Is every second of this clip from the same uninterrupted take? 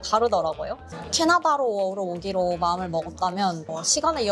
no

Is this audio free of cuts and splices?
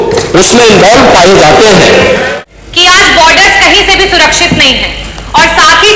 no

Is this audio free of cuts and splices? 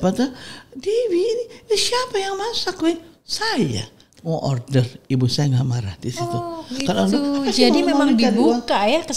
yes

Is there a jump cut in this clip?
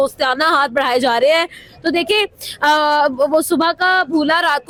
no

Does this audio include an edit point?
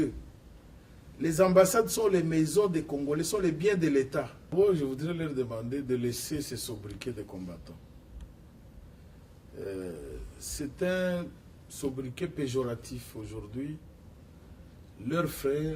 yes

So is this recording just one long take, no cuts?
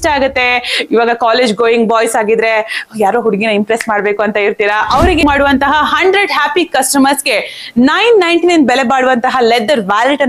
no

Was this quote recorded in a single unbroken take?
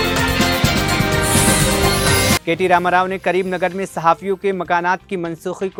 yes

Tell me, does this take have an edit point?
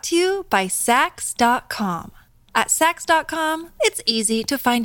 no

